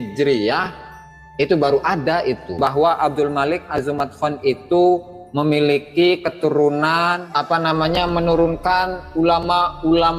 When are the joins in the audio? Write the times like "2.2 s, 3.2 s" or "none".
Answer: 2.5 s, 7.3 s